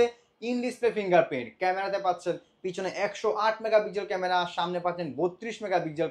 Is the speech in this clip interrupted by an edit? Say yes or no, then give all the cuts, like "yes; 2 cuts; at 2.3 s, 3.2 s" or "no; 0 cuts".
no; 0 cuts